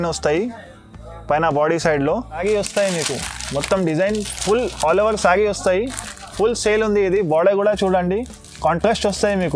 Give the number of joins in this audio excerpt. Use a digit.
1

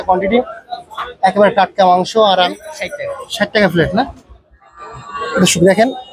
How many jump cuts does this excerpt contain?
1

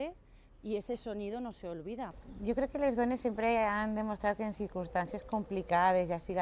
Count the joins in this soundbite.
1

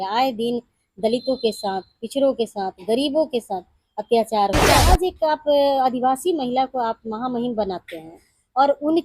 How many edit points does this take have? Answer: 1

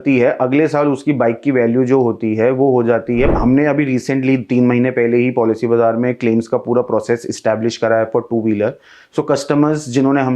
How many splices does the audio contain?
1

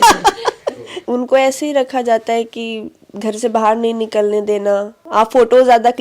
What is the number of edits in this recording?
2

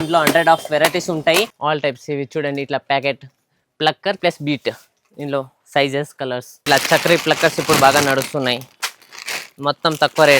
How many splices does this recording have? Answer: 2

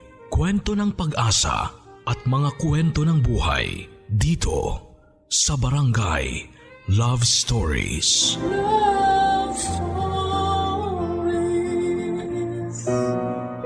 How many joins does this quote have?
1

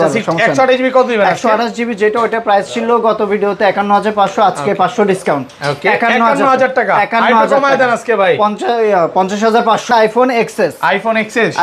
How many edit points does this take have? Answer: 1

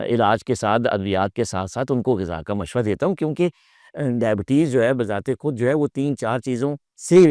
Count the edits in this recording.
0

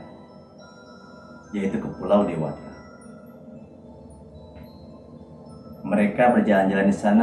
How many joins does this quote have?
0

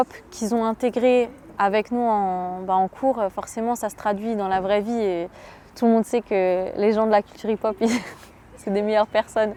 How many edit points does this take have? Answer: 0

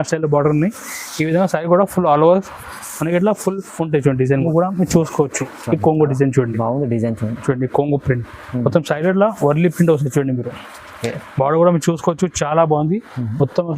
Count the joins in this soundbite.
1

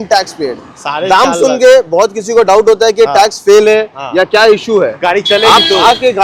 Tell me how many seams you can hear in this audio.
0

